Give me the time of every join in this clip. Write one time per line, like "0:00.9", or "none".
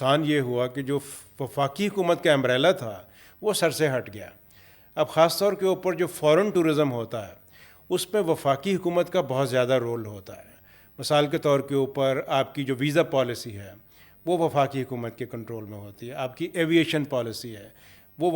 none